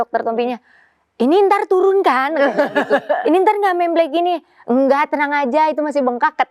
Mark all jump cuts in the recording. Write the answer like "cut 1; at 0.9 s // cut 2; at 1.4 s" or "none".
none

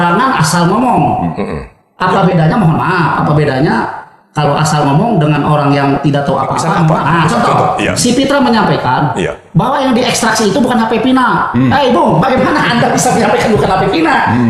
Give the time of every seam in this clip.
cut 1; at 7.0 s

